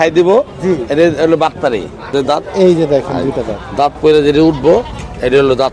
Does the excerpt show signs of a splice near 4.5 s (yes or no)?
no